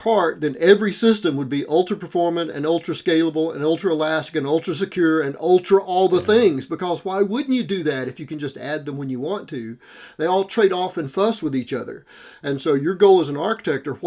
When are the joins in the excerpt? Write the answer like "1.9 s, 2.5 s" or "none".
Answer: none